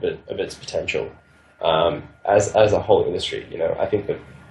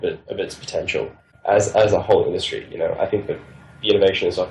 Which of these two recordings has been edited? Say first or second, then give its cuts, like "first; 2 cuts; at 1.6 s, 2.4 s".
second; 1 cut; at 1.3 s